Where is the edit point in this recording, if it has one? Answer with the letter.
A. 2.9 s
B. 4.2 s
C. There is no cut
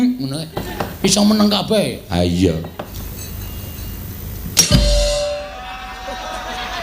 A